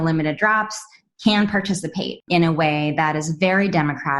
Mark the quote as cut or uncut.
cut